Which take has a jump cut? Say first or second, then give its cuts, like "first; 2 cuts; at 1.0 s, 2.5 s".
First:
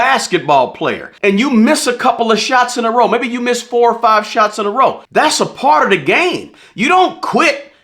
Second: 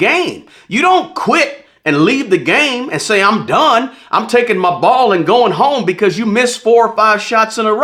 first; 2 cuts; at 1.1 s, 5.0 s